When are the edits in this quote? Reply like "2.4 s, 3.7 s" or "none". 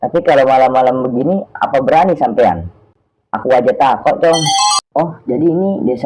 4.8 s